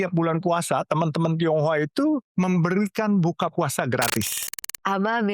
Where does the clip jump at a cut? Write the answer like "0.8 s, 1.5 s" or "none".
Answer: 4.4 s